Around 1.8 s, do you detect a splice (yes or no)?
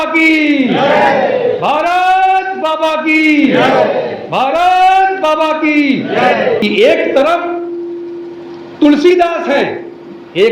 no